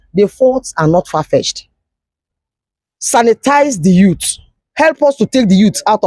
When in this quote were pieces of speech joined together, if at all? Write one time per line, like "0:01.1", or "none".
0:02.1